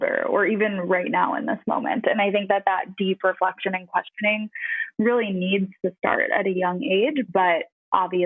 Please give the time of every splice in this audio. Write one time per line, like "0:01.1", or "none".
none